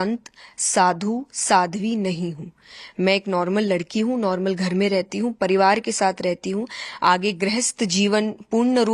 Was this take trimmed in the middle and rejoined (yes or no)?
no